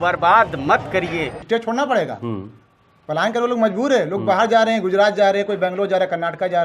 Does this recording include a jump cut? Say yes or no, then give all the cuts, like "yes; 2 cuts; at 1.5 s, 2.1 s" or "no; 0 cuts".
yes; 1 cut; at 1.3 s